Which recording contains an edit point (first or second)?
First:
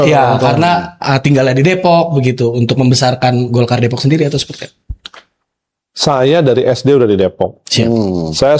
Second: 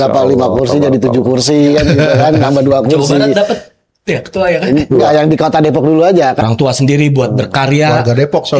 second